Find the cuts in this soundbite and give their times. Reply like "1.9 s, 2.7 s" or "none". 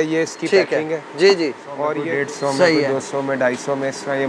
2.0 s